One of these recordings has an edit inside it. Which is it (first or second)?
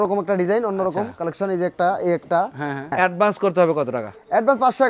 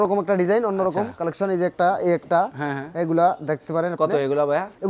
first